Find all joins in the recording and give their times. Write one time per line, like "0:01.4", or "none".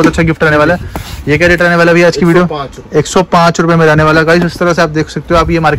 none

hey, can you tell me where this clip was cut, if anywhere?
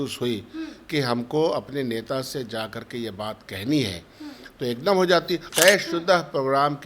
0:05.5

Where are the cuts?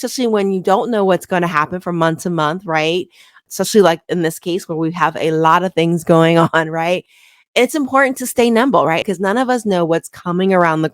none

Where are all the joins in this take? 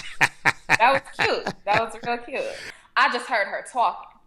0:02.7

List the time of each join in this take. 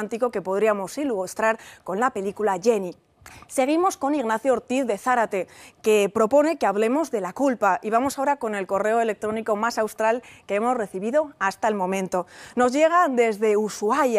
none

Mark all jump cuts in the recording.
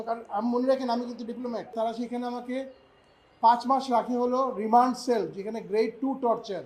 0:01.7

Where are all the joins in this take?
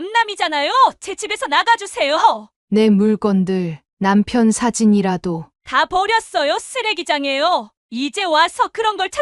0:02.5

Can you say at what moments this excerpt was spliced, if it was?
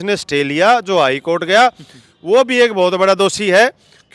none

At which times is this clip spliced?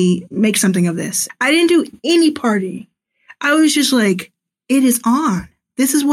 0:01.1

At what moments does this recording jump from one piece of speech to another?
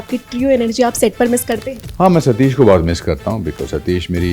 0:01.8

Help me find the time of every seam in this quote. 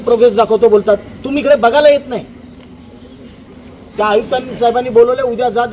0:03.9

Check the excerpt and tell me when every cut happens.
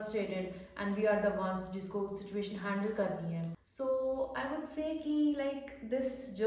0:03.6

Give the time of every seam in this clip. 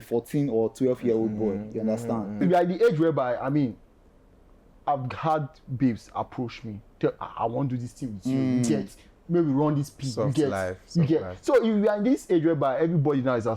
0:02.4

